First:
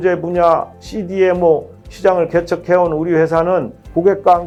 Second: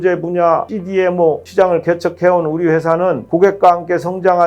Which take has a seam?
second; 2 cuts; at 1.1 s, 3.2 s

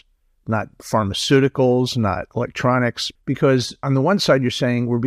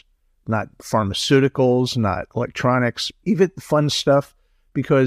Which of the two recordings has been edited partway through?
first; 1 cut; at 3.4 s

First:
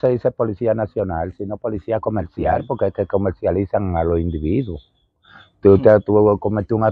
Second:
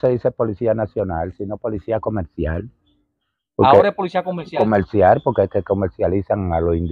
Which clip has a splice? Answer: first; 1 cut; at 2.6 s

